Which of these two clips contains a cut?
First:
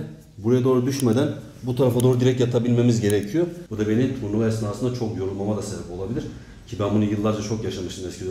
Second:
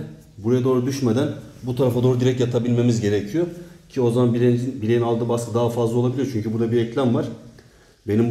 first; 1 cut; at 3.6 s

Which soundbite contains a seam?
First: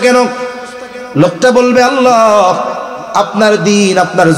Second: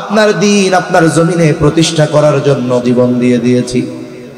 second; 1 cut; at 2.8 s

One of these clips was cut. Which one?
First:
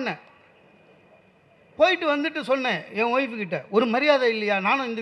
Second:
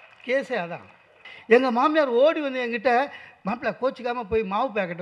second; 1 cut; at 1.3 s

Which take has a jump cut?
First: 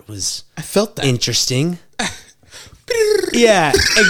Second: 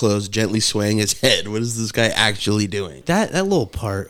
second; 1 cut; at 3.0 s

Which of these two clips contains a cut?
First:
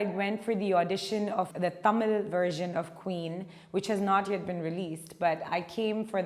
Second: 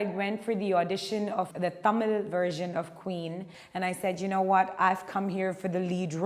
second; 1 cut; at 3.5 s

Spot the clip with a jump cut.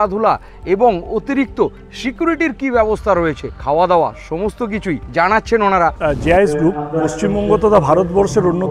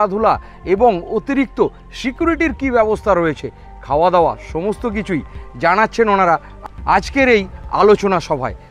first; 3 cuts; at 3.5 s, 5.0 s, 6.0 s

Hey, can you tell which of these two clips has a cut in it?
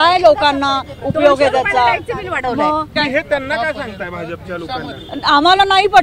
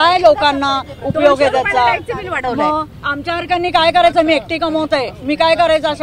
first; 1 cut; at 2.9 s

